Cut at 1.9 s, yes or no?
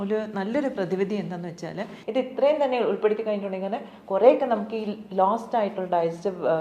yes